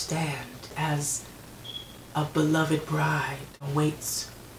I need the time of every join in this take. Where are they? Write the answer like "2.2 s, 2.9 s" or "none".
0.7 s, 3.7 s